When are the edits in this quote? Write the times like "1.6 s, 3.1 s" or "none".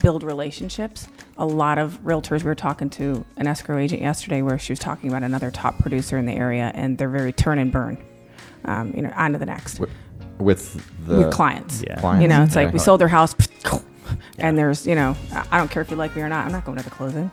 none